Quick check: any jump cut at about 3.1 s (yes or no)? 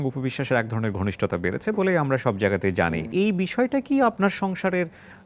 yes